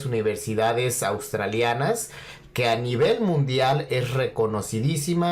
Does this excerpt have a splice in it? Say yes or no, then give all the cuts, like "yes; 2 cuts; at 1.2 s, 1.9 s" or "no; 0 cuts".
no; 0 cuts